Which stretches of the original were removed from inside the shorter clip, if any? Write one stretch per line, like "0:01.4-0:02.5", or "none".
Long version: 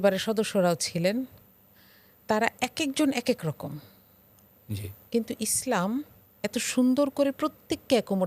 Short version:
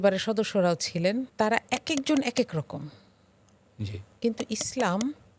0:01.3-0:02.2

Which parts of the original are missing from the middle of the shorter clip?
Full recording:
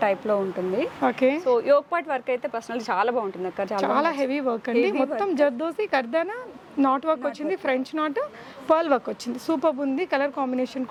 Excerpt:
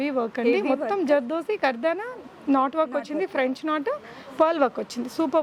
none

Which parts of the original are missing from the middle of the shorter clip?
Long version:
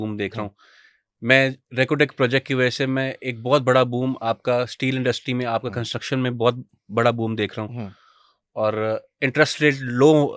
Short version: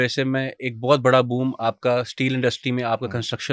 none

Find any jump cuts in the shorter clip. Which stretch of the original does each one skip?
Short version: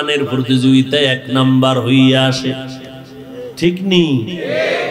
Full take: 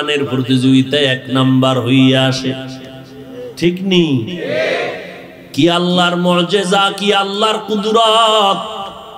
none

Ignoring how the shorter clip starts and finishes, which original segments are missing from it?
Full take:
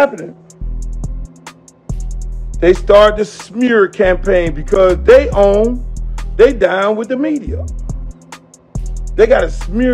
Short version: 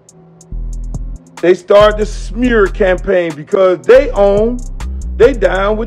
none

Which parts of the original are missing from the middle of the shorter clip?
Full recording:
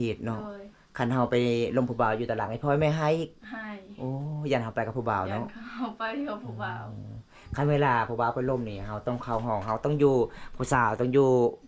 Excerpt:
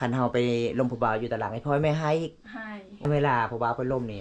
0:03.9-0:07.5

